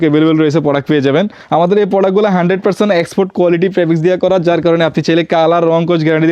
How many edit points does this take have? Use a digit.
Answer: 1